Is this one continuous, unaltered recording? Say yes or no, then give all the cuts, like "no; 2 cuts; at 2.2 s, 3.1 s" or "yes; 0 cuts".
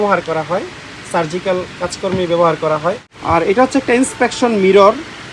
no; 1 cut; at 3.1 s